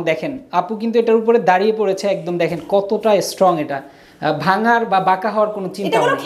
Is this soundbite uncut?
yes; 0 cuts

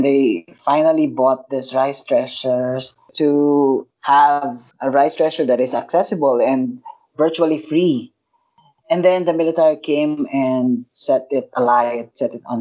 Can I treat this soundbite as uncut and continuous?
no; 3 cuts; at 3.1 s, 4.1 s, 10.9 s

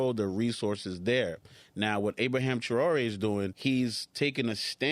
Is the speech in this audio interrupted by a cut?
yes; 1 cut; at 3.5 s

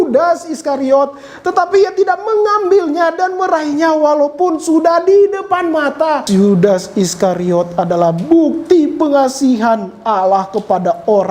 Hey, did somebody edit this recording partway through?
yes; 1 cut; at 6.2 s

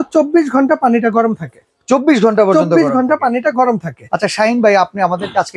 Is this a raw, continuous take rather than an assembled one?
yes; 0 cuts

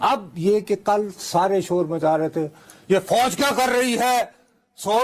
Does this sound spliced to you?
no; 0 cuts

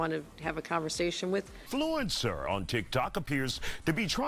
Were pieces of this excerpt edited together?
yes; 1 cut; at 1.6 s

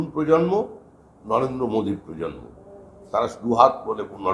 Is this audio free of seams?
yes; 0 cuts

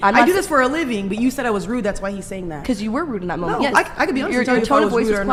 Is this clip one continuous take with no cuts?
yes; 0 cuts

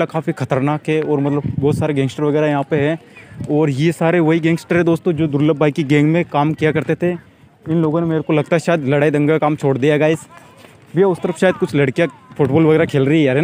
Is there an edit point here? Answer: no; 0 cuts

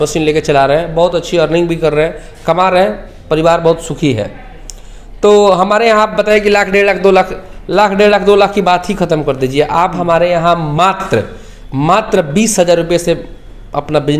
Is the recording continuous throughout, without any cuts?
yes; 0 cuts

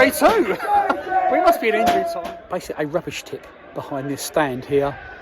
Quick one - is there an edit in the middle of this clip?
yes; 1 cut; at 2.1 s

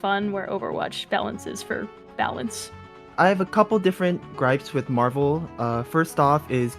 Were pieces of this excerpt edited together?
no; 0 cuts

